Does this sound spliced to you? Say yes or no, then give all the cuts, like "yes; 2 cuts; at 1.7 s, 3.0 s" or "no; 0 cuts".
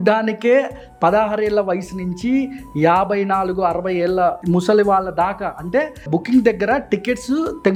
no; 0 cuts